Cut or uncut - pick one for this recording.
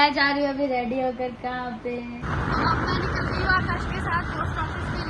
cut